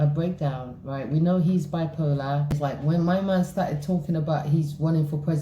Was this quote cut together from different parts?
yes; 1 cut; at 2.6 s

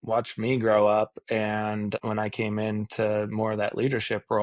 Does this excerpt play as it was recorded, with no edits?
no; 1 cut; at 2.0 s

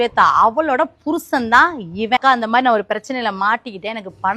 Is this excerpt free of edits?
yes; 0 cuts

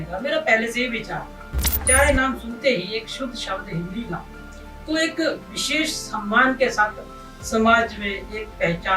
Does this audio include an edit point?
yes; 1 cut; at 1.9 s

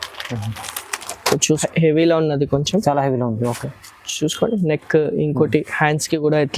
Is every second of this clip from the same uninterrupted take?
no; 1 cut; at 1.6 s

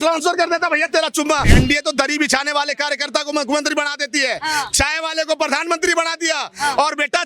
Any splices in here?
yes; 1 cut; at 1.5 s

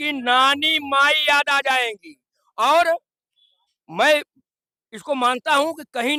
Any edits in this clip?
no; 0 cuts

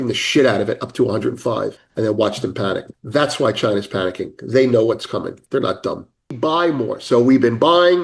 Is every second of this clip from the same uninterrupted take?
no; 3 cuts; at 1.8 s, 2.9 s, 6.3 s

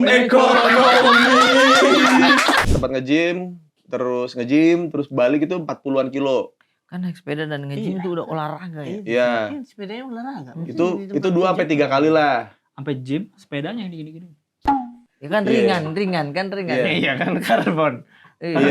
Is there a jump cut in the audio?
yes; 1 cut; at 2.7 s

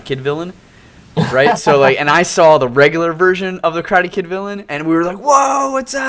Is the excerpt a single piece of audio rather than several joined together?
no; 1 cut; at 3.1 s

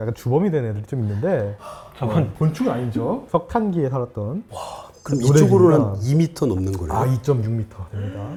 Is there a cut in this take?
no; 0 cuts

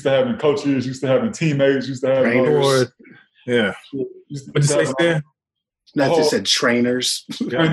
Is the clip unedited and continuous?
yes; 0 cuts

